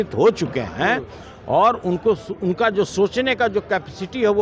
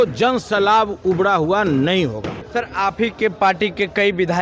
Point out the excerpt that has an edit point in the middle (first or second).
second